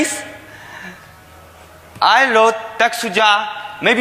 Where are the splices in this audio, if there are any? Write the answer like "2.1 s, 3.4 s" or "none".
1.2 s